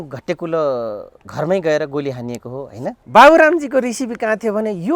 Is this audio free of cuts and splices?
no; 1 cut; at 3.0 s

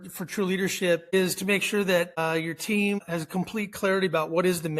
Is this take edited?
yes; 3 cuts; at 1.0 s, 2.1 s, 3.0 s

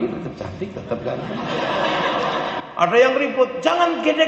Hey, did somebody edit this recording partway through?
yes; 1 cut; at 2.6 s

